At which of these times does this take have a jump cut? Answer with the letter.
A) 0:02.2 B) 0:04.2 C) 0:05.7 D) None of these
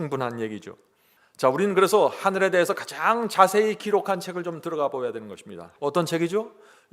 C